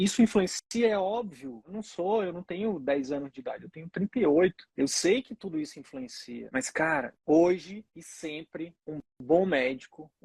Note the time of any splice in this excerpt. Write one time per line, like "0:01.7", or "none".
0:06.4